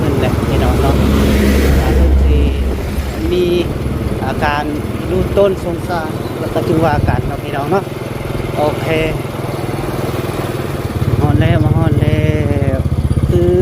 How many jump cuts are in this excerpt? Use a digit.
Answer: 1